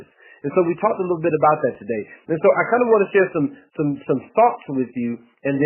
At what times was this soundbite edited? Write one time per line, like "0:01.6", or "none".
0:01.8